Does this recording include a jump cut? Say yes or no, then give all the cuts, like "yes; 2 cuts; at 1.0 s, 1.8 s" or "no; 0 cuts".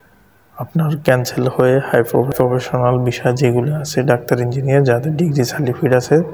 no; 0 cuts